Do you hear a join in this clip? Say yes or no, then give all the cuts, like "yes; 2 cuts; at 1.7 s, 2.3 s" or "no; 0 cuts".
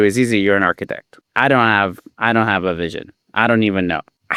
no; 0 cuts